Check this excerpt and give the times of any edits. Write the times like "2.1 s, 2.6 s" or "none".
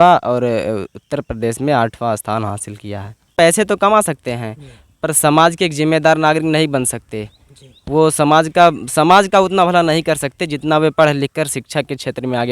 3.3 s